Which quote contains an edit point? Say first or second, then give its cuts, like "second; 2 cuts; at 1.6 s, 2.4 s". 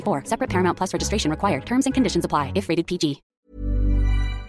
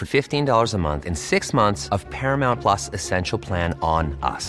first; 1 cut; at 3.3 s